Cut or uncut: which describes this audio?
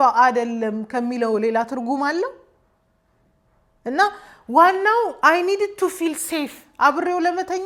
uncut